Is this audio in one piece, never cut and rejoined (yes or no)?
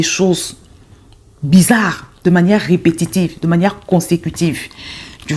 yes